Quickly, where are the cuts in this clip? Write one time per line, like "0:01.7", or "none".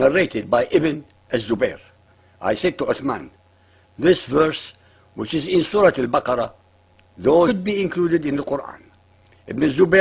none